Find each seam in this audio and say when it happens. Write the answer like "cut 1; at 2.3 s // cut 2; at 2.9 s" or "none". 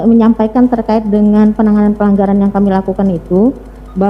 none